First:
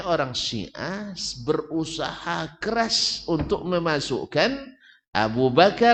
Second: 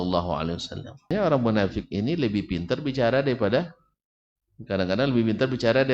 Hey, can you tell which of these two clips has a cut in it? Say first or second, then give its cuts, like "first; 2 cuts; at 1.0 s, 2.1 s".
second; 1 cut; at 1.1 s